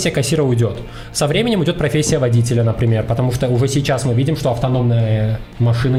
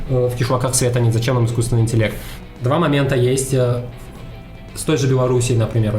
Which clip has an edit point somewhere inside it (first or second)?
second